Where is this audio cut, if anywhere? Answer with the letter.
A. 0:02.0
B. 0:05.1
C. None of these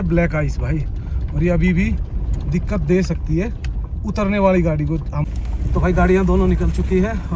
B